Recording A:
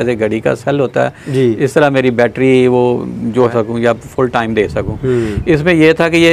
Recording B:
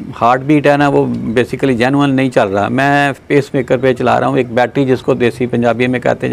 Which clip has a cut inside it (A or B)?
A